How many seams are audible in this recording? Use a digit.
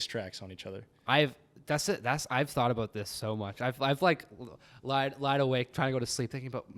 0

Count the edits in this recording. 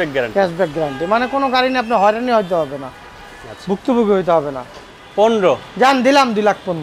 1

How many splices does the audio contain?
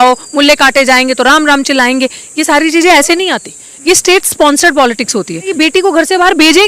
1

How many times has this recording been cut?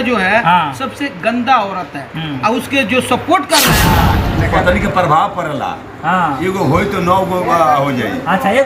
1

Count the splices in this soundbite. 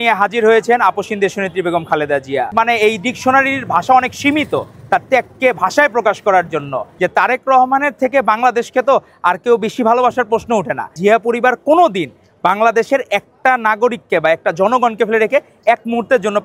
3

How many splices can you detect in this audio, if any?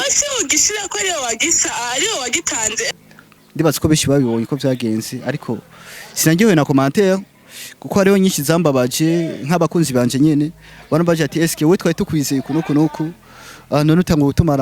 1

